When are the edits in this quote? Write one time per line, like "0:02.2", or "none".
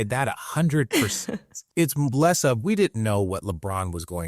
0:01.6